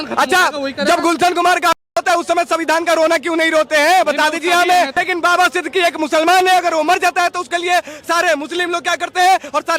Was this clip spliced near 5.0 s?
yes; 1 cut; at 5.0 s

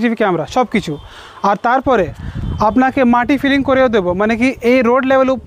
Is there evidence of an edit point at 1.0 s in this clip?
no; 0 cuts

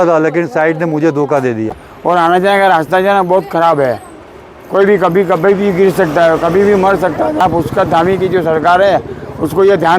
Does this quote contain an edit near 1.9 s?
yes; 2 cuts; at 1.9 s, 7.4 s

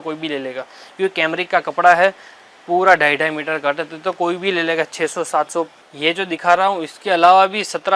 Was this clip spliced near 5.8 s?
yes; 1 cut; at 5.8 s

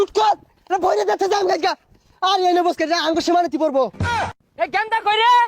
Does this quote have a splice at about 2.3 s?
no; 1 cut; at 4.3 s

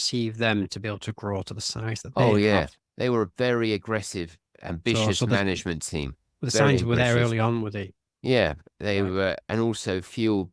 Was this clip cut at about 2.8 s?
yes; 1 cut; at 2.8 s

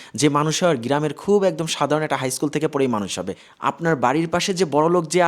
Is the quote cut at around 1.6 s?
no; 1 cut; at 3.3 s

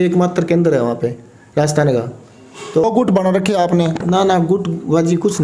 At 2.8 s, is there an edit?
yes; 1 cut; at 2.8 s

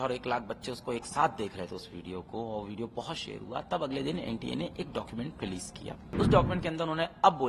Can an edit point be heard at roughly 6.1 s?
yes; 1 cut; at 6.1 s

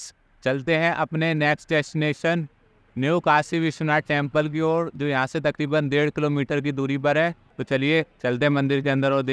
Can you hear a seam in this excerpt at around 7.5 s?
yes; 1 cut; at 7.5 s

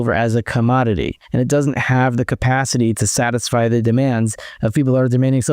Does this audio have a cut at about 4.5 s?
no; 1 cut; at 1.2 s

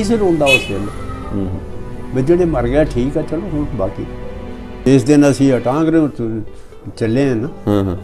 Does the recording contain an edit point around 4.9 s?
yes; 1 cut; at 4.9 s

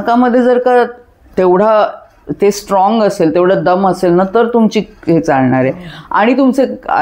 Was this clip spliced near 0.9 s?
no; 0 cuts

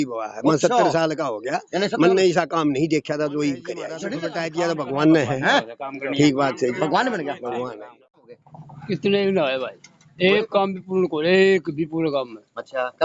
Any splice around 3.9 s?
yes; 2 cuts; at 3.9 s, 8.3 s

